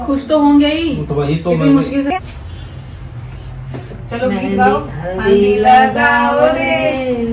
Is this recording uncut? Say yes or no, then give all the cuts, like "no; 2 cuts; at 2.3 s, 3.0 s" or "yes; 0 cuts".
no; 1 cut; at 2.1 s